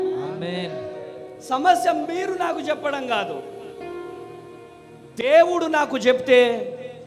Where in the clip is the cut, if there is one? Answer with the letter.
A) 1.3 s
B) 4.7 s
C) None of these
C